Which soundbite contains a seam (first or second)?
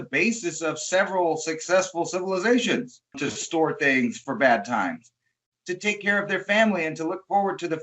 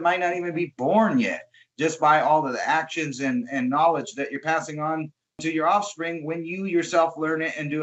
first